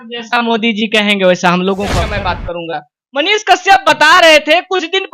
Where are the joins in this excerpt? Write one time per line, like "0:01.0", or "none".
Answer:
0:02.1